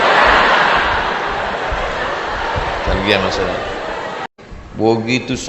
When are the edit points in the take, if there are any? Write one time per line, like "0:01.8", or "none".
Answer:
0:04.3